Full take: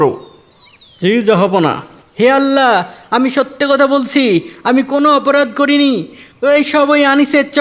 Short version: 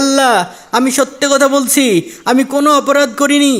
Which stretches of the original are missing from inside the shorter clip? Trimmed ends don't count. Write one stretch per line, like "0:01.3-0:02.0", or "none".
none